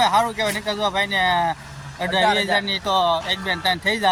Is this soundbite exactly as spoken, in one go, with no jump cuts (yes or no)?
yes